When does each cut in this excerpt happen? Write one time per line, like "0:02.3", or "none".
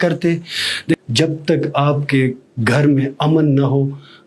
0:01.0